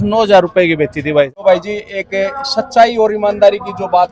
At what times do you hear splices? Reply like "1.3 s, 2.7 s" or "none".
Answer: 1.3 s

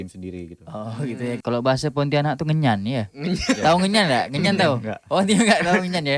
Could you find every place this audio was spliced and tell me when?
1.4 s

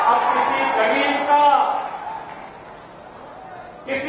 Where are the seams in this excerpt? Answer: none

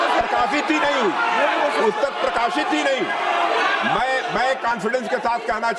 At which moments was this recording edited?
none

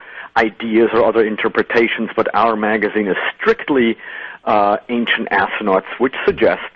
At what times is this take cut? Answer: 5.4 s

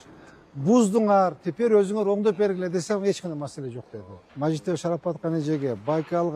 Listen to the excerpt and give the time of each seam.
4.2 s

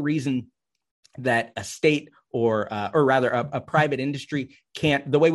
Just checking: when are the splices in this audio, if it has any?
none

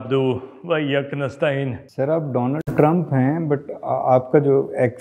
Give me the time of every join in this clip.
1.8 s

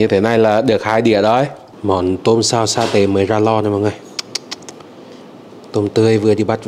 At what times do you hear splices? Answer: 1.7 s

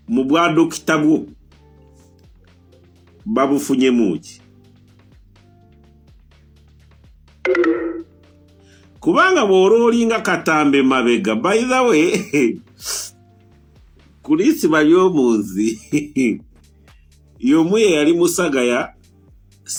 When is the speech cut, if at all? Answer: none

